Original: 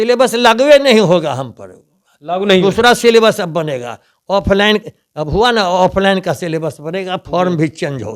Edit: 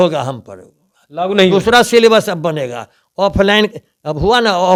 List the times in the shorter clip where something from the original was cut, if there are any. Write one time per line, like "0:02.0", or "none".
none